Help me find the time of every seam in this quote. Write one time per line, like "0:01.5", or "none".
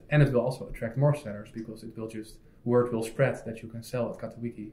none